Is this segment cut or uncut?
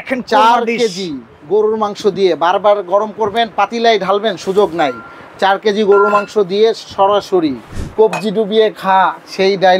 cut